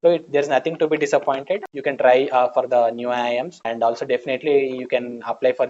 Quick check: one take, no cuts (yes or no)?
no